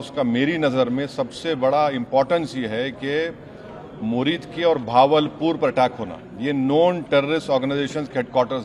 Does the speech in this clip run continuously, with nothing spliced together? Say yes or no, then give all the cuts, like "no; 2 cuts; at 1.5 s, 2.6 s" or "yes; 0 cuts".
yes; 0 cuts